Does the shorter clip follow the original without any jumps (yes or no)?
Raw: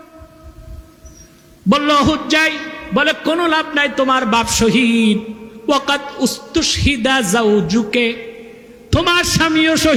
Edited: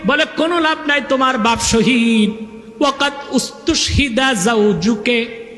yes